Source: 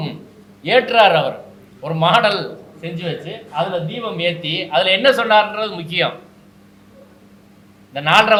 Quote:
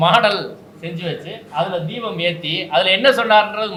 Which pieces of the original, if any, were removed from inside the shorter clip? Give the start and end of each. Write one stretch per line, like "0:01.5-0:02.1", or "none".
none